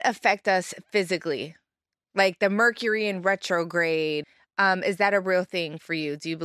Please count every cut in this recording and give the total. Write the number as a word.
one